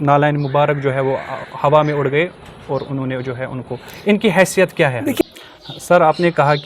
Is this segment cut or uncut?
cut